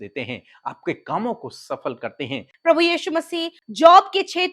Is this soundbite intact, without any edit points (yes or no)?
no